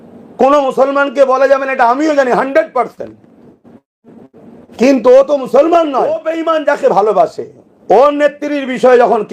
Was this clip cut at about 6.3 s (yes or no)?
yes